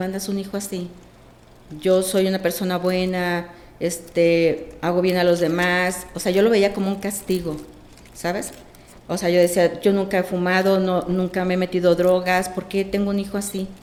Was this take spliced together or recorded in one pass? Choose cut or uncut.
uncut